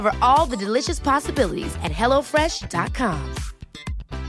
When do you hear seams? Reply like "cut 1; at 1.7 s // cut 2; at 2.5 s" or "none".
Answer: none